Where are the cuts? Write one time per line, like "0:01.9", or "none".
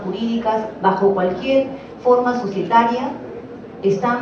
0:03.3